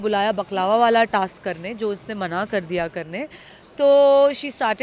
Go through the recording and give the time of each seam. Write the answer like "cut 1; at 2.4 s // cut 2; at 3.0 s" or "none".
none